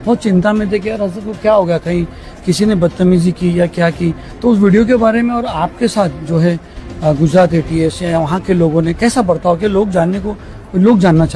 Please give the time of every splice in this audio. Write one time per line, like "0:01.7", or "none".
none